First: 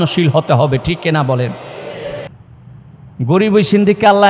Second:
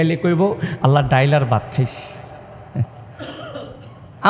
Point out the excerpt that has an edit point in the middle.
first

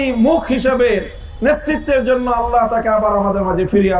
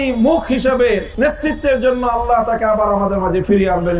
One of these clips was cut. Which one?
second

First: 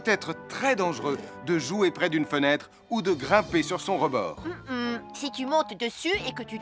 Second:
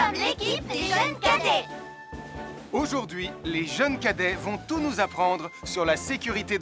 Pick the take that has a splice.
second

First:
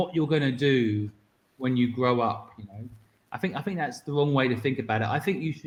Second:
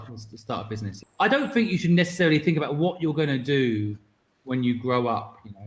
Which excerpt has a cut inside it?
second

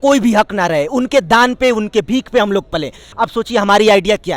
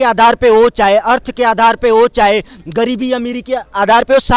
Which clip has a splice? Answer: first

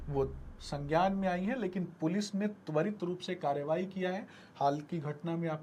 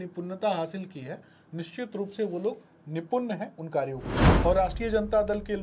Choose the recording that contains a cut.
second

